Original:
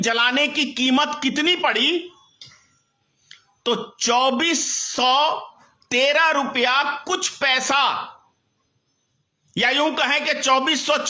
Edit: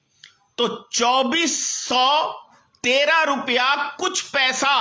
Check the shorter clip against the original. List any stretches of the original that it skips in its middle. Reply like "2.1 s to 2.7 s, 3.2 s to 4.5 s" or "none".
none